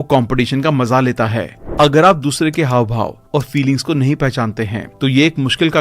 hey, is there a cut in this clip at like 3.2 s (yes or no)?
no